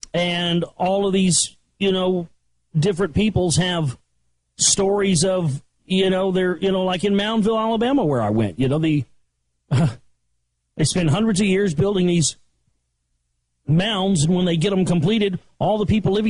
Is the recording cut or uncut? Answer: uncut